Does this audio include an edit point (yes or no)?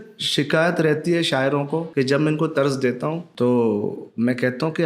yes